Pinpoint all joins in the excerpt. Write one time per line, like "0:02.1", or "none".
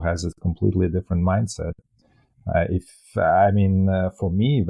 none